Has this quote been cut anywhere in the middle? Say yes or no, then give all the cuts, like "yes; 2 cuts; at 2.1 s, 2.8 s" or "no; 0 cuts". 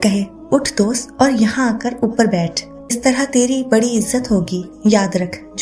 yes; 1 cut; at 3.0 s